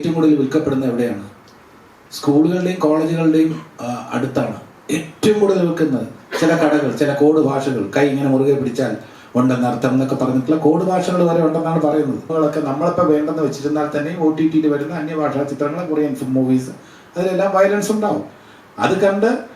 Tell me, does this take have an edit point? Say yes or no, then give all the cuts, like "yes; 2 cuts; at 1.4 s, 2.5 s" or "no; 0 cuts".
yes; 1 cut; at 12.3 s